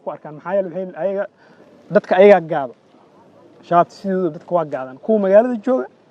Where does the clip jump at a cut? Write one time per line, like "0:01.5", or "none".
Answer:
none

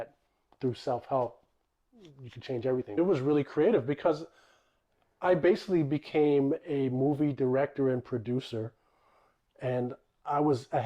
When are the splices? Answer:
0:03.0

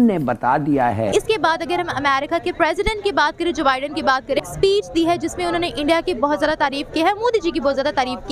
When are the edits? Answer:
0:01.0
0:04.5

